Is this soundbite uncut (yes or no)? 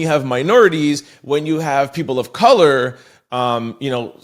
yes